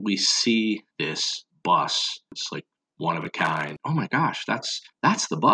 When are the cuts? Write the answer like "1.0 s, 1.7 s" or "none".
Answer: 2.3 s, 3.7 s